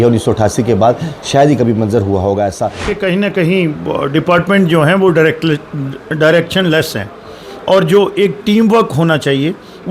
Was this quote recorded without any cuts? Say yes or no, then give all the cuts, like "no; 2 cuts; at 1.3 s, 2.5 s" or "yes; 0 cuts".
no; 1 cut; at 2.9 s